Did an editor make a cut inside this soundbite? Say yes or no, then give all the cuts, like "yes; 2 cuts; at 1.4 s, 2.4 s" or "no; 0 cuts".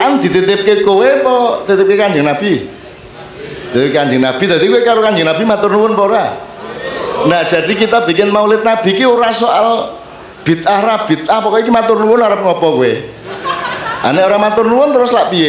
no; 0 cuts